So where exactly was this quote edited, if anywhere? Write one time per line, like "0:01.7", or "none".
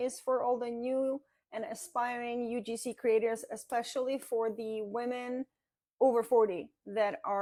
none